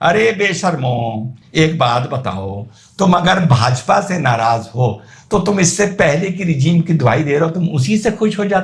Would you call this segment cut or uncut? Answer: uncut